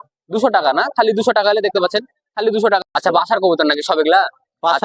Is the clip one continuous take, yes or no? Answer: no